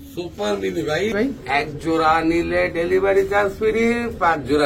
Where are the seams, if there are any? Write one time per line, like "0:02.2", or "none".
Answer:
0:01.1